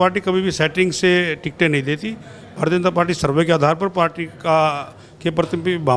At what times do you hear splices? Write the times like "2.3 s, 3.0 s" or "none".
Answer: none